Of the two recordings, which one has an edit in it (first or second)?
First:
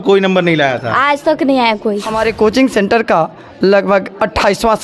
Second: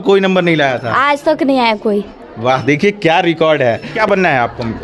first